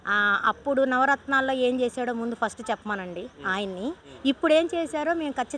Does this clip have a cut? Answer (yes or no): no